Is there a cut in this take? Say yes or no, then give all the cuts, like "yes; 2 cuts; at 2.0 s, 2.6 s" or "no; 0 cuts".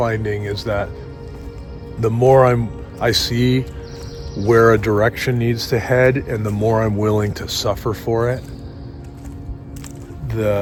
no; 0 cuts